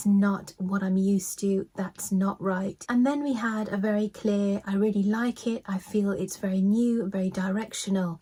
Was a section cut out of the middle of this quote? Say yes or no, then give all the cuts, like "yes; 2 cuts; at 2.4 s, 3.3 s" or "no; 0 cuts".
no; 0 cuts